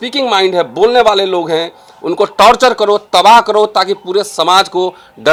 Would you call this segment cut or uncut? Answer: uncut